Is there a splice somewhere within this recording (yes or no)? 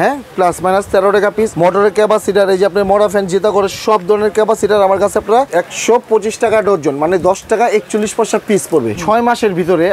yes